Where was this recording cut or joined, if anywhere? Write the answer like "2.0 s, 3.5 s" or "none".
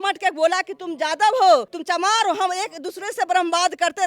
1.7 s